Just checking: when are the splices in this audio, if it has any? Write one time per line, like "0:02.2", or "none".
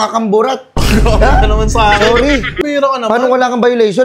0:02.6